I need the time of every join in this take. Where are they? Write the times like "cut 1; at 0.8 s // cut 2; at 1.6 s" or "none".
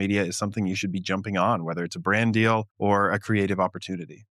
cut 1; at 2.7 s